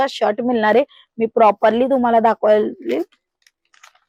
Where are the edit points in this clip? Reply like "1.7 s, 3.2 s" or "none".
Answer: none